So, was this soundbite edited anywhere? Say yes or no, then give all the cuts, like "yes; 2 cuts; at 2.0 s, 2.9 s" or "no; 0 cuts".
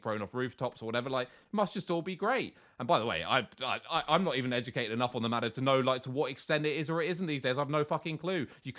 no; 0 cuts